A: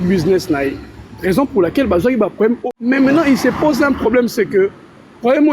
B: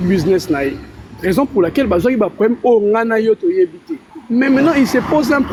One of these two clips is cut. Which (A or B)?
A